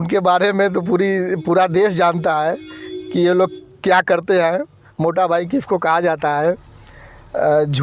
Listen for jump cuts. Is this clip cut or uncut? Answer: uncut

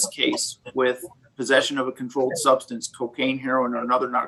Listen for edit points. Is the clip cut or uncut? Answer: uncut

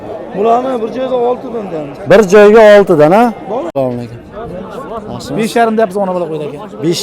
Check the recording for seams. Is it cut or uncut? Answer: cut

